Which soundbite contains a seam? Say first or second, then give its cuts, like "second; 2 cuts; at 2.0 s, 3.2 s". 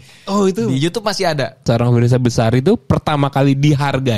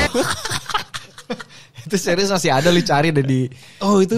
first; 1 cut; at 1.6 s